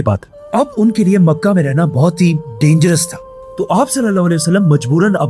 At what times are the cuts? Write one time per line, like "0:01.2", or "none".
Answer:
none